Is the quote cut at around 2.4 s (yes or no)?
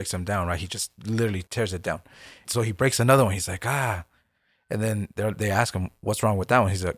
yes